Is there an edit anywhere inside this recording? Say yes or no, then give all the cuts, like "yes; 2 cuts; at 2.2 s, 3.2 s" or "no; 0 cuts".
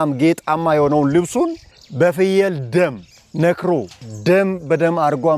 no; 0 cuts